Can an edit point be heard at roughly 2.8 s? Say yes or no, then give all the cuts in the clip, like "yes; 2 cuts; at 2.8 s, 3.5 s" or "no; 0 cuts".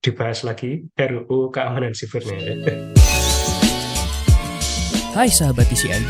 yes; 1 cut; at 2.8 s